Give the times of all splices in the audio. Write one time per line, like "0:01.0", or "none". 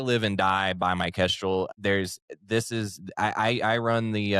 0:01.7